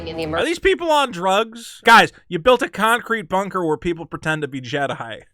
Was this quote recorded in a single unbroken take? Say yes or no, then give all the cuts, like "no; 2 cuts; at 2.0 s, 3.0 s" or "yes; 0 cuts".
no; 1 cut; at 1.6 s